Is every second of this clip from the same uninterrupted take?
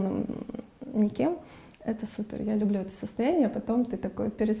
yes; 0 cuts

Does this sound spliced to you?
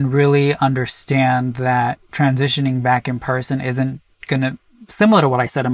no; 0 cuts

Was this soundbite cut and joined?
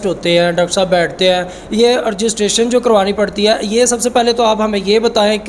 no; 0 cuts

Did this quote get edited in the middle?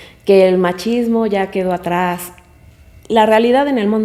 no; 0 cuts

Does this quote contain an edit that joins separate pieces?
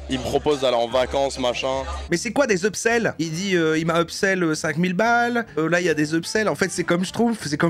no; 0 cuts

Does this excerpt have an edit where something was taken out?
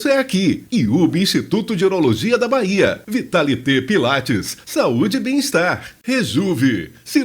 yes; 1 cut; at 5.9 s

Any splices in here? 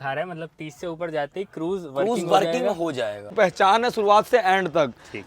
yes; 1 cut; at 3.3 s

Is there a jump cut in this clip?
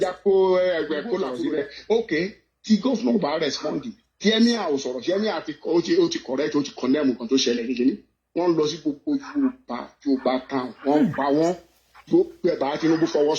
yes; 1 cut; at 1.3 s

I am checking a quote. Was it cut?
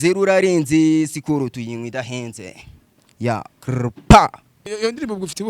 yes; 1 cut; at 4.6 s

